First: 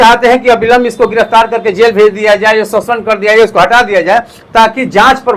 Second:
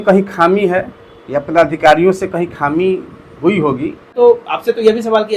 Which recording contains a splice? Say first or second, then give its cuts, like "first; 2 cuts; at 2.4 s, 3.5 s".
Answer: second; 1 cut; at 4.1 s